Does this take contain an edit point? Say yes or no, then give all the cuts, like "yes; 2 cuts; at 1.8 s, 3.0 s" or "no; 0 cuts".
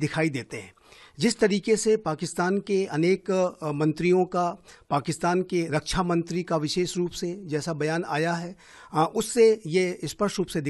no; 0 cuts